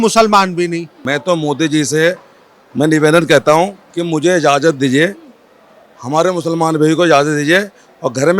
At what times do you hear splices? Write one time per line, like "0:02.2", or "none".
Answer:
0:01.0